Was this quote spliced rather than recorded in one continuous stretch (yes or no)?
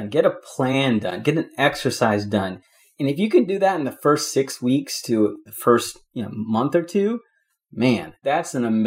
yes